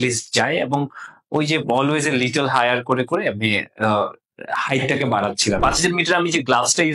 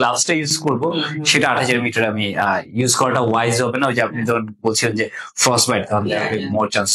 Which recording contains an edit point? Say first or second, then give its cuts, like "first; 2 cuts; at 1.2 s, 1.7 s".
first; 1 cut; at 5.6 s